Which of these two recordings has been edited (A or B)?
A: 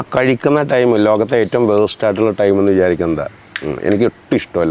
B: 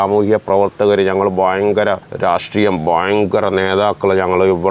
B